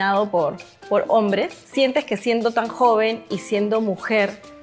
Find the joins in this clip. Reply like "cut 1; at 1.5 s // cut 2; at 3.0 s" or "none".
cut 1; at 1.6 s